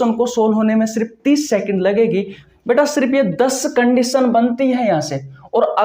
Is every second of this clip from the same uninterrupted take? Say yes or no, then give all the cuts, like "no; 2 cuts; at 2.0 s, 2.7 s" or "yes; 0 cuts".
no; 1 cut; at 2.4 s